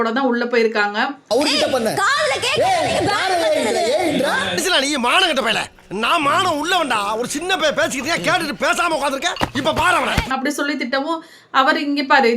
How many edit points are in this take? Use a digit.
0